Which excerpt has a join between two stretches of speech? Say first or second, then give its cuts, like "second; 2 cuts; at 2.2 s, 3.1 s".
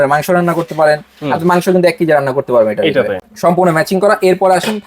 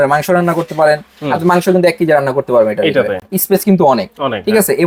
first; 1 cut; at 3.2 s